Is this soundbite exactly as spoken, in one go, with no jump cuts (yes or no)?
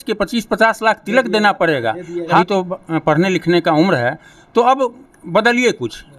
no